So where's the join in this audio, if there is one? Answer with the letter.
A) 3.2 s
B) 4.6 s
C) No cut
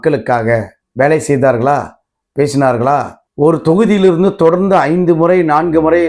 A